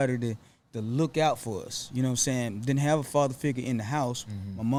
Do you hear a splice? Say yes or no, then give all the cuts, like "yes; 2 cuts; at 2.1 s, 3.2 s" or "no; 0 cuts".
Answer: no; 0 cuts